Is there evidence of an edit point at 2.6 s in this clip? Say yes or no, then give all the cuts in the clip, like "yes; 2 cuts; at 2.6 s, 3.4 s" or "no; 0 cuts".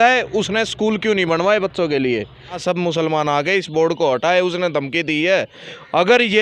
yes; 1 cut; at 2.6 s